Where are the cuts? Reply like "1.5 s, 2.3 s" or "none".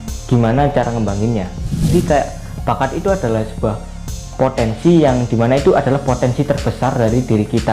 1.9 s